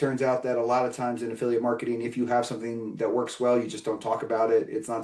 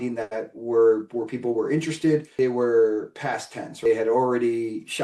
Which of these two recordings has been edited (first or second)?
second